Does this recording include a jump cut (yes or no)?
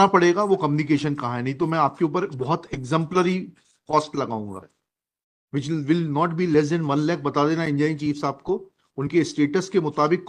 no